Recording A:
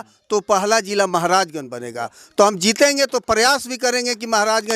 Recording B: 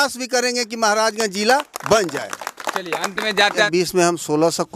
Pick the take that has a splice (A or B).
B